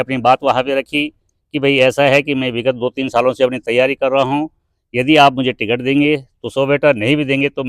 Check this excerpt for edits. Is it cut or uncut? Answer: uncut